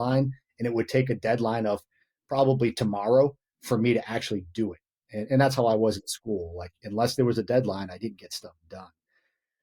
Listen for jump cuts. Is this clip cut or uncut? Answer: uncut